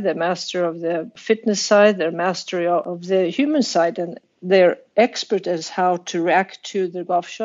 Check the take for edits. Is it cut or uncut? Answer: cut